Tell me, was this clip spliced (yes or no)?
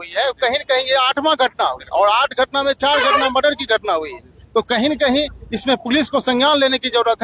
no